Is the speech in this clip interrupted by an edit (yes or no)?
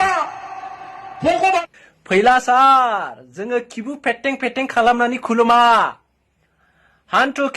yes